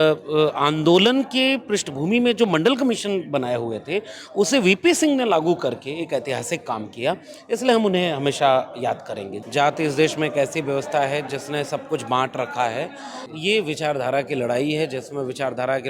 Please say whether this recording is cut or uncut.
cut